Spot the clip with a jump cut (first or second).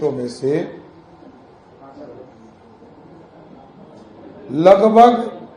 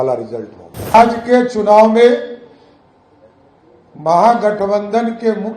second